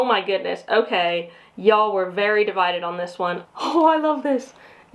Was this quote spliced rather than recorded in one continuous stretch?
yes; 1 cut; at 3.4 s

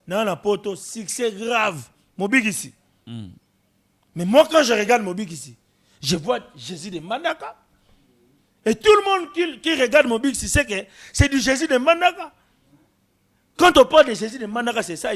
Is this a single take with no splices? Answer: yes; 0 cuts

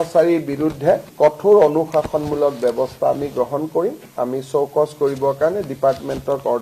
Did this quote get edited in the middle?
no; 0 cuts

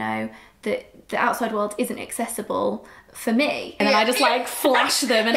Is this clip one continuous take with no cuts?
no; 1 cut; at 3.7 s

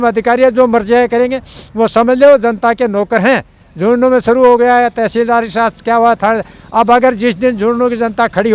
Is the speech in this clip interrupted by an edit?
no; 0 cuts

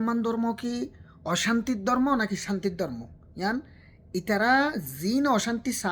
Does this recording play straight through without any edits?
yes; 0 cuts

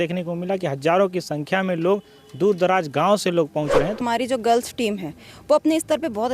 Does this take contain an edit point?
yes; 1 cut; at 4.1 s

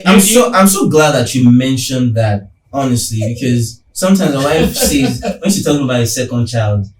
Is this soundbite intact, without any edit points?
yes; 0 cuts

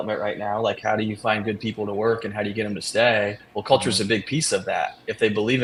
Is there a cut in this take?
no; 0 cuts

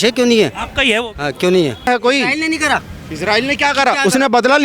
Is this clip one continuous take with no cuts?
no; 1 cut; at 1.9 s

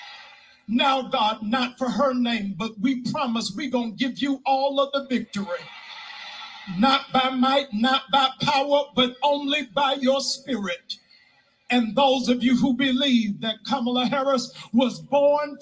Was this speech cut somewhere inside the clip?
no; 0 cuts

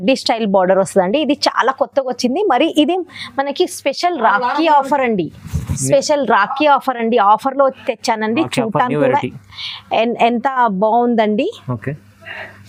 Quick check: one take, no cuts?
yes; 0 cuts

